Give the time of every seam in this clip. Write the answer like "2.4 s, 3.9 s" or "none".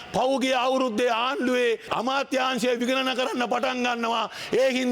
1.9 s